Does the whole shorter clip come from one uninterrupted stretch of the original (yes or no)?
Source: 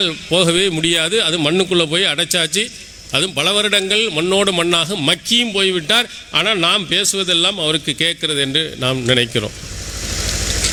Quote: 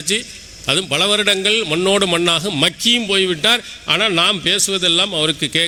yes